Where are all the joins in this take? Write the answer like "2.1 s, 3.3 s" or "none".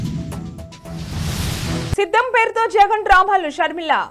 1.9 s